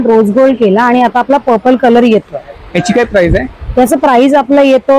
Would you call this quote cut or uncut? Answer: uncut